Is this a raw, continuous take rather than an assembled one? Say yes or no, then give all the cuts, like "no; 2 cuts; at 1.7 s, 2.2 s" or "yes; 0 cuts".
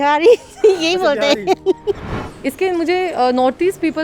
no; 1 cut; at 2.1 s